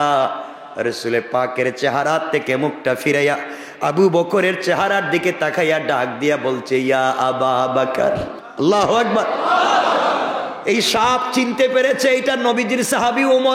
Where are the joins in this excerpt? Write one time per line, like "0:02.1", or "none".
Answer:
0:08.4

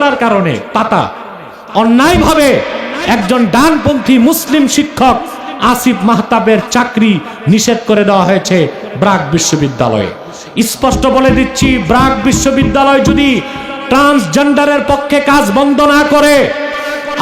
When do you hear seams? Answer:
none

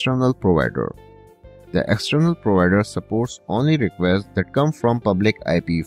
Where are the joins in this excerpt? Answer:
none

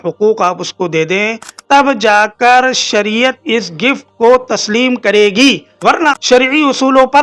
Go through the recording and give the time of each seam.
0:01.6
0:06.0

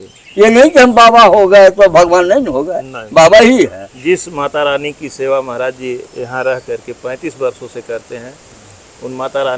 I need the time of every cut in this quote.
0:03.9

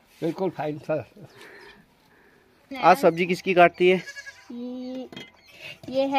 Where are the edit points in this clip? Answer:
0:02.7

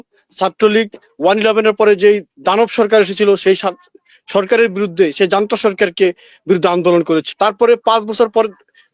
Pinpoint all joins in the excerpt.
0:07.3

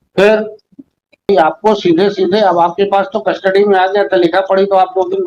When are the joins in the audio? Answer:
0:01.3

